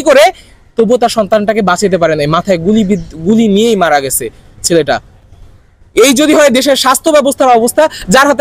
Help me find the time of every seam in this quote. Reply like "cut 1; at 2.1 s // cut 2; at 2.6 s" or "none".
none